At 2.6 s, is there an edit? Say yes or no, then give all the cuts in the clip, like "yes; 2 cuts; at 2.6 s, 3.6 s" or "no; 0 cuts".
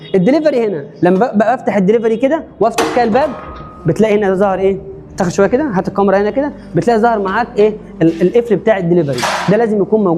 no; 0 cuts